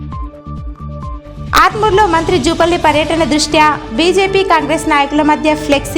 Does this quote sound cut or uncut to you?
cut